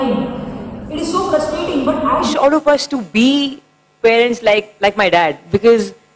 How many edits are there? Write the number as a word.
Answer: one